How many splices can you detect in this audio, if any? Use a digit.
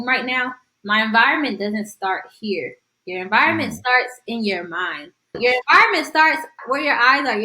2